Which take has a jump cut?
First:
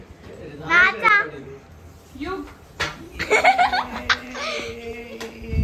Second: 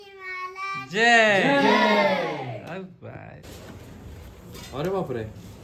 second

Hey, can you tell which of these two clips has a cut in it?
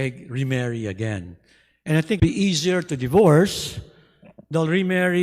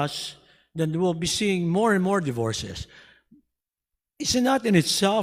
first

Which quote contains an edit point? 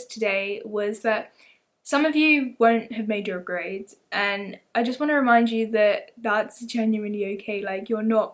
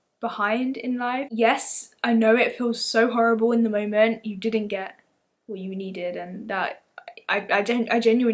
second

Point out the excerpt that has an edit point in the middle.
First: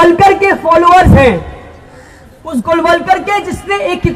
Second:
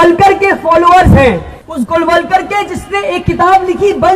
second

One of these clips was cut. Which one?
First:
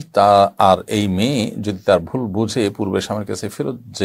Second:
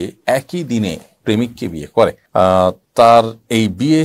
second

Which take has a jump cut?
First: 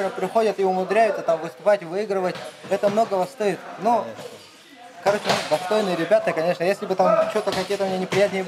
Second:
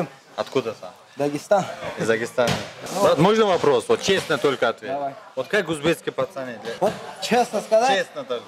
second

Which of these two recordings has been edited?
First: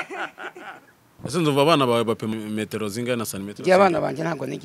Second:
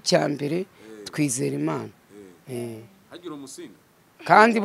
first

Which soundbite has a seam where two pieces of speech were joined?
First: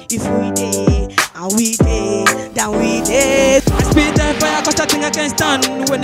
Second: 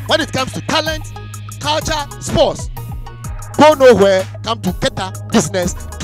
first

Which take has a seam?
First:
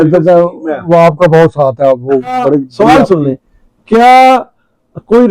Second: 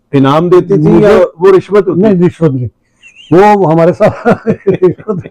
first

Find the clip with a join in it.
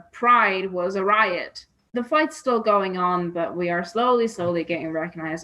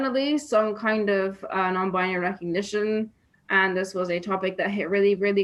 first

